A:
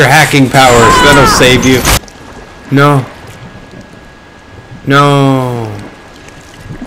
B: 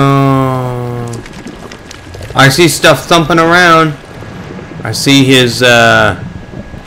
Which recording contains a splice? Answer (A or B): A